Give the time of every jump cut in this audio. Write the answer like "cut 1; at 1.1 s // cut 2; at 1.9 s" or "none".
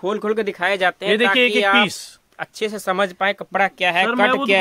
none